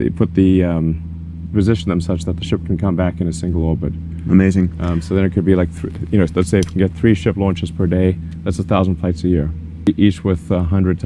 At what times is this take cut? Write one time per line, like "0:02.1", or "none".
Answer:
0:09.8